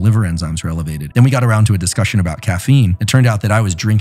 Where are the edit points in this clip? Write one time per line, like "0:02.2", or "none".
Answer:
0:01.0